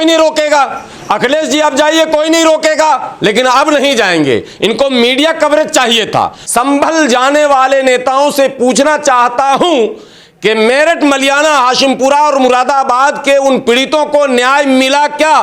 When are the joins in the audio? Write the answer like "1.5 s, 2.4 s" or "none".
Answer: 6.4 s